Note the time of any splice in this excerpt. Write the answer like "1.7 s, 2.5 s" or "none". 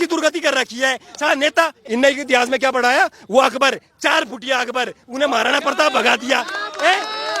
1.8 s